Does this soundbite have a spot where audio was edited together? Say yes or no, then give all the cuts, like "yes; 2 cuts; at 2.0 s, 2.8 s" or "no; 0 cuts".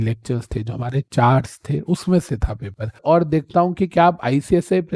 yes; 1 cut; at 3.0 s